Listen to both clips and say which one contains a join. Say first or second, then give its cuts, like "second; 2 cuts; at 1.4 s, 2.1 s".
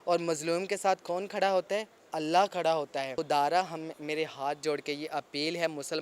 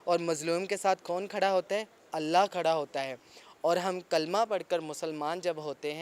first; 1 cut; at 3.1 s